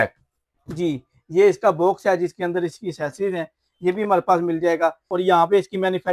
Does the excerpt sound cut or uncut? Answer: cut